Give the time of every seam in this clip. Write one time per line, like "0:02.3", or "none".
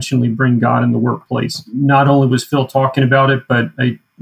0:01.6